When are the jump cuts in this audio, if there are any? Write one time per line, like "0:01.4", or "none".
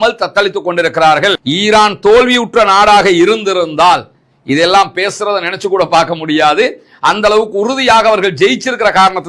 0:01.4